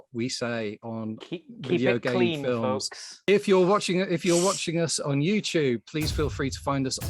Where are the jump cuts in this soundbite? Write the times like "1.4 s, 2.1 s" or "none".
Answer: 3.3 s